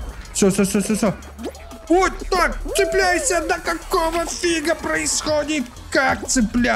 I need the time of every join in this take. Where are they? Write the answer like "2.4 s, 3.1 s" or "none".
none